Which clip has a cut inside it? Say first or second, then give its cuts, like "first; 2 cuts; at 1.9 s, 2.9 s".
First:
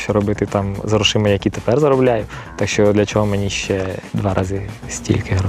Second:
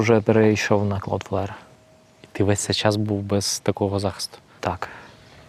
first; 1 cut; at 4.0 s